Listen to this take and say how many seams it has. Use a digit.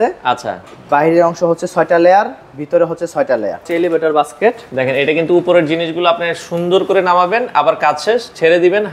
1